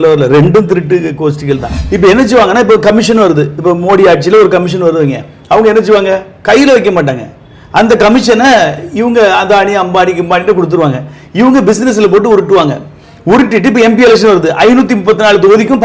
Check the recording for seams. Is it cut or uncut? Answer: cut